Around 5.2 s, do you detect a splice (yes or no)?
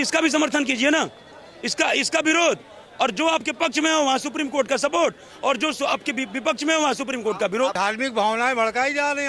no